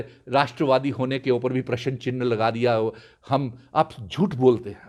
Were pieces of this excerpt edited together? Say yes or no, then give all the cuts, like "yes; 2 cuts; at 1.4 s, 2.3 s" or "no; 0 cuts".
no; 0 cuts